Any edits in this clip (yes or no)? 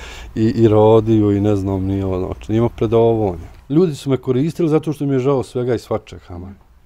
yes